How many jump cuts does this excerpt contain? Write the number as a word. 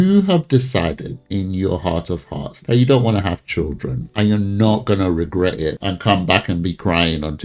two